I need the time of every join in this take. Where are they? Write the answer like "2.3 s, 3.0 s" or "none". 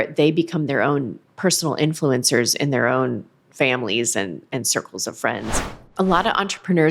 5.8 s